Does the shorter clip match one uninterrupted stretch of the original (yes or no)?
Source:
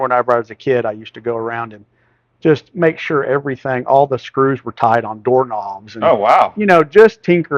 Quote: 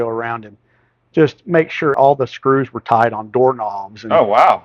no